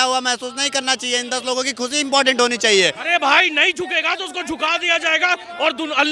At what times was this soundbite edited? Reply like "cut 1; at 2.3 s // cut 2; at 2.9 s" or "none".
cut 1; at 3.0 s